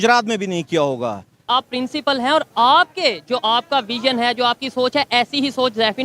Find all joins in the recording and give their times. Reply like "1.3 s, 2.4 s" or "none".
1.3 s